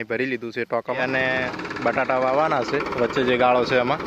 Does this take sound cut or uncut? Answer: cut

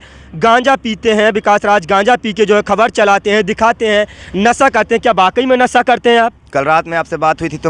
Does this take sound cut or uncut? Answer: uncut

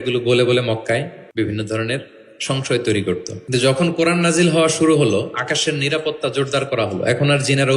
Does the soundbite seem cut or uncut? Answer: cut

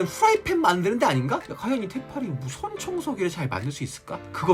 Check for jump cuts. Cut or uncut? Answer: cut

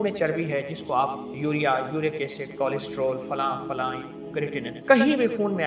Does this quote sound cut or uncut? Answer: cut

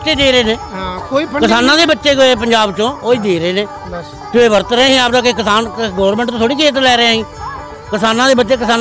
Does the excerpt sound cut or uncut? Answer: uncut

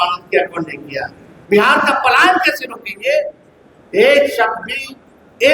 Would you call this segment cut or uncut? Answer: cut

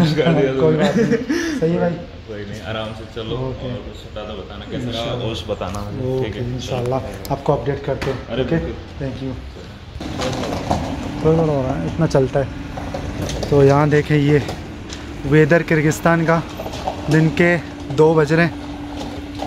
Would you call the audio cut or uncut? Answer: uncut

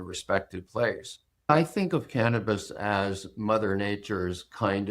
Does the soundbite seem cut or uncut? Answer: cut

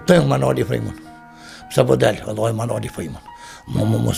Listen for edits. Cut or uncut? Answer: uncut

